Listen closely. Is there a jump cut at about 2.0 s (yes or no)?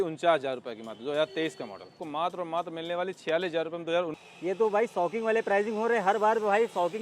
yes